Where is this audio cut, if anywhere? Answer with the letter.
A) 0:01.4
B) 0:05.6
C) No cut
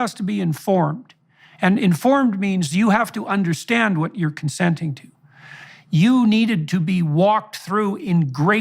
B